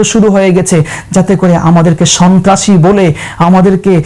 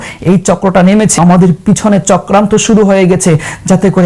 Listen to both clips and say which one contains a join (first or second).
second